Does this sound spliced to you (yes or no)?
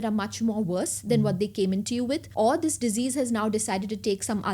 yes